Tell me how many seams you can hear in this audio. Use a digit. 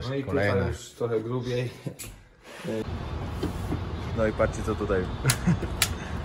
1